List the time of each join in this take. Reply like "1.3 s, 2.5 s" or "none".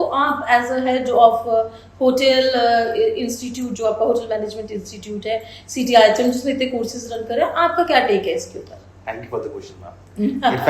none